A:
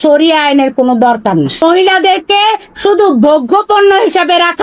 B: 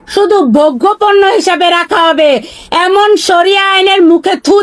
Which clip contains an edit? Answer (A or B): A